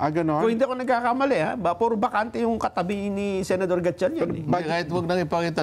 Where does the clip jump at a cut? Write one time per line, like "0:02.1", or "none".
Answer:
none